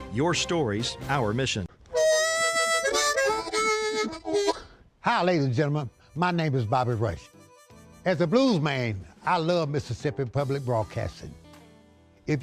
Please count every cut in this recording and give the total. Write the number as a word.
one